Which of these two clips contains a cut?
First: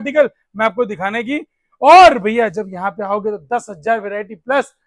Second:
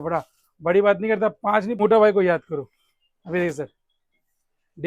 second; 1 cut; at 1.8 s

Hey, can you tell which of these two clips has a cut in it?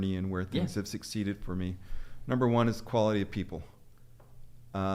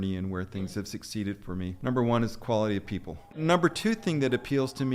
second; 2 cuts; at 1.8 s, 3.4 s

